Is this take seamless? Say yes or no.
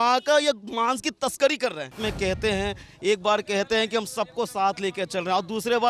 no